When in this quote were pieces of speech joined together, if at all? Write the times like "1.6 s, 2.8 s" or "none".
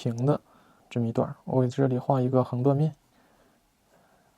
3.1 s